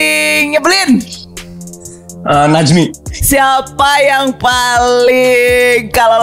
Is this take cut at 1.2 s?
no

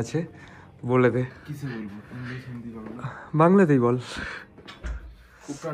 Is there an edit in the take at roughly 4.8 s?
yes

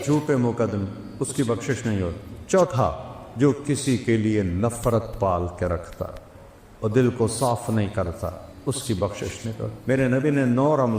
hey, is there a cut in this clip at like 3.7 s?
no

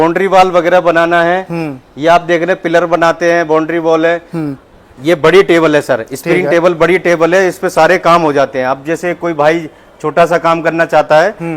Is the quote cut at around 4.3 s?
no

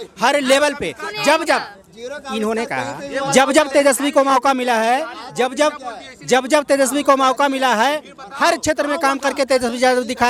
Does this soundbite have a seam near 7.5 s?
no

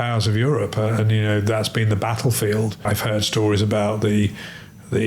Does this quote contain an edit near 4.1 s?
no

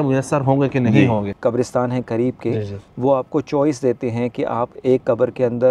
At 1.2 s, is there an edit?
yes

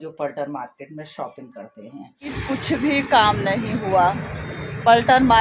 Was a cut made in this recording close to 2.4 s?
yes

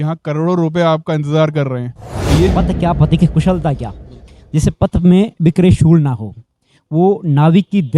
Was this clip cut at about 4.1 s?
no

